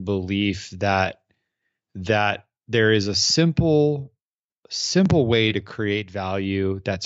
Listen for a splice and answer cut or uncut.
uncut